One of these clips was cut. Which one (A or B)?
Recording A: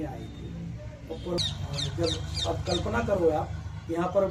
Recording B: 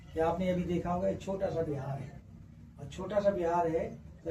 A